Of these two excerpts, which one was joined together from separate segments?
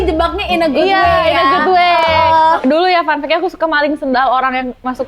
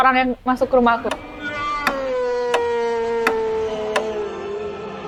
first; 1 cut; at 2.6 s

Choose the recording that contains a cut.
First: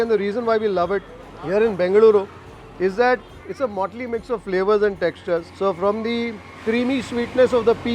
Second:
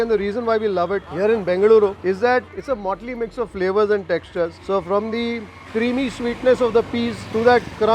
second; 2 cuts; at 1.1 s, 2.4 s

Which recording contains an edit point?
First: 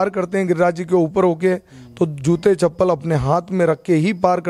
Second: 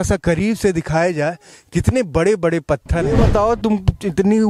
second; 1 cut; at 3.1 s

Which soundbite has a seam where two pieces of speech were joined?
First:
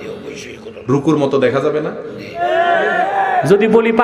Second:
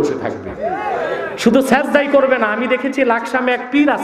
first; 1 cut; at 2.4 s

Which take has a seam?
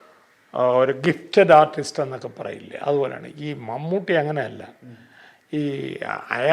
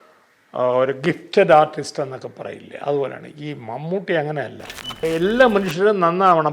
second; 1 cut; at 5.0 s

